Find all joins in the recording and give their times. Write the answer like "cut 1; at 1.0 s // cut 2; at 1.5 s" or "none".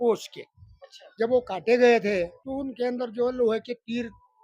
cut 1; at 2.4 s